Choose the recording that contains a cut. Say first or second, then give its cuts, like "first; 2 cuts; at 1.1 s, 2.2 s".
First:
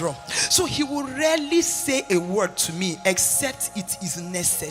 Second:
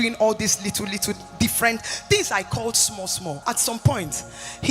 second; 1 cut; at 3.4 s